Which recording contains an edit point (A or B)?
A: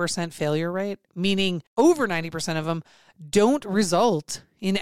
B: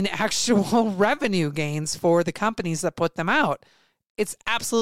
A